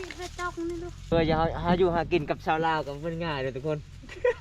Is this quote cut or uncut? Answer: cut